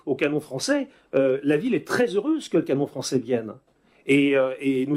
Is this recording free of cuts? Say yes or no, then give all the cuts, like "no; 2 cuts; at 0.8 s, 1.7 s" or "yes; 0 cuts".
yes; 0 cuts